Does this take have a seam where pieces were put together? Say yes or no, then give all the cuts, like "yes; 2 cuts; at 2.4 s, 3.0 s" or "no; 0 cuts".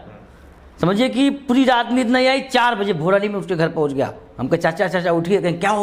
no; 0 cuts